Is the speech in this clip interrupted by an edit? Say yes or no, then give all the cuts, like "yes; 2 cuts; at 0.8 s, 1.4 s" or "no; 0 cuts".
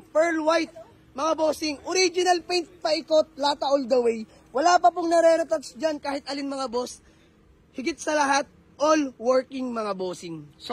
no; 0 cuts